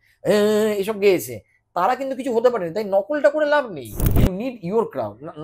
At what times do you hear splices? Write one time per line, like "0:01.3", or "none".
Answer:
0:04.0